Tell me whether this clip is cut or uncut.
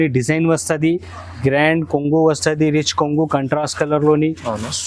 cut